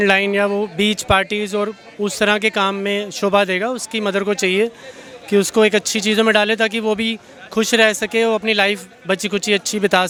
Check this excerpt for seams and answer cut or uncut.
uncut